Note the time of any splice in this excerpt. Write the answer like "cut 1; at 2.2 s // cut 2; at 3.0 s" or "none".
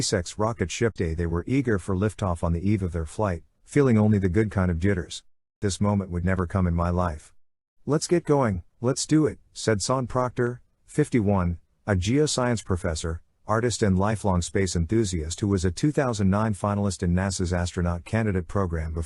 cut 1; at 0.9 s // cut 2; at 5.5 s